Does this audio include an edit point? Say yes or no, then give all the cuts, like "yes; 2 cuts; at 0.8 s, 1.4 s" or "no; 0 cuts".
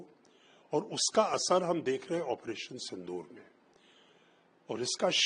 no; 0 cuts